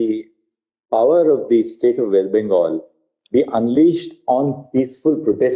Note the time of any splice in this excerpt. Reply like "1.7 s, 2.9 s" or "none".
none